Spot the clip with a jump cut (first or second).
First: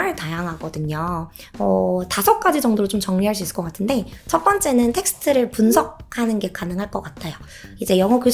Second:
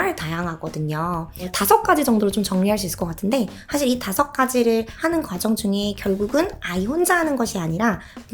second